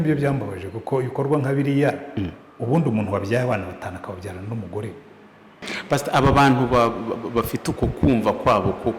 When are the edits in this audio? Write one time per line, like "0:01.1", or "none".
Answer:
0:05.7